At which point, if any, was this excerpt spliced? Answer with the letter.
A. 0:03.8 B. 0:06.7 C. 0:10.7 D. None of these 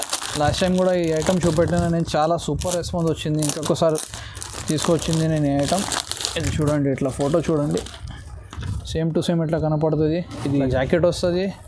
C